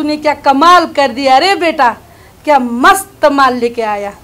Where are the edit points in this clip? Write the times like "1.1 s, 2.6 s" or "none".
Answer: none